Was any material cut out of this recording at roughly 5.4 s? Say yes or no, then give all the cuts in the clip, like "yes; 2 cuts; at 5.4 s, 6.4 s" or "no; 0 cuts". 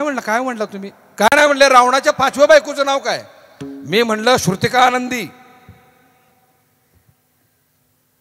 no; 0 cuts